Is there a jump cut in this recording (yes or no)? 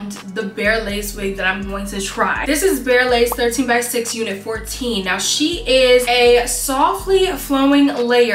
no